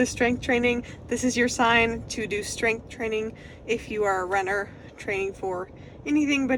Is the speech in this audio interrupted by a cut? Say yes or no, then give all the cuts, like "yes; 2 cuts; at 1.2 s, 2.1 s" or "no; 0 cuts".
no; 0 cuts